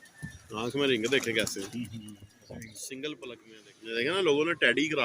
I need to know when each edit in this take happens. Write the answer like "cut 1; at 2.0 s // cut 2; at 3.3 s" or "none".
cut 1; at 3.5 s